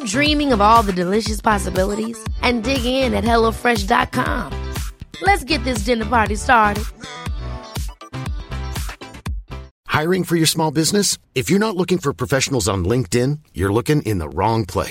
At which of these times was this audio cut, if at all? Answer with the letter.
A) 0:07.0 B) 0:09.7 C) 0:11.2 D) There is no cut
B